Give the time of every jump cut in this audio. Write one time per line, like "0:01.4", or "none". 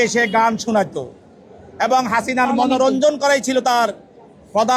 none